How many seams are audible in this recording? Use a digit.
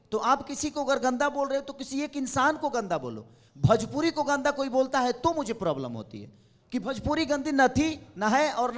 0